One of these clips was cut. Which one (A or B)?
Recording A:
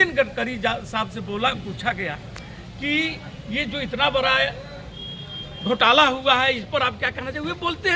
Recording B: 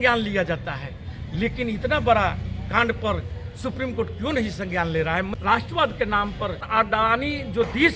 B